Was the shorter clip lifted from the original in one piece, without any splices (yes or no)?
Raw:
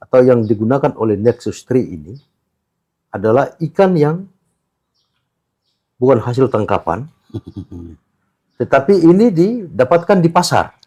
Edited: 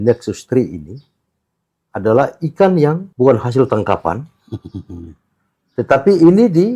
no